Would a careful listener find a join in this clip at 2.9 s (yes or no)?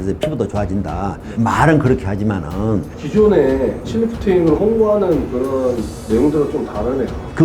yes